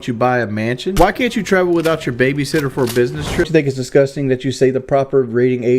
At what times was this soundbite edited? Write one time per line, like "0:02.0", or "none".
0:00.9
0:03.5